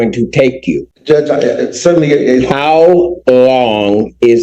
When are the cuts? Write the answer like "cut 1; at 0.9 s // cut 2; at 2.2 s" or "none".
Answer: cut 1; at 0.9 s